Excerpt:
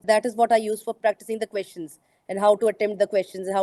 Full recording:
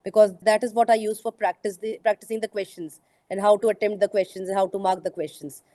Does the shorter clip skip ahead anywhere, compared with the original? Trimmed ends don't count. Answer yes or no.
yes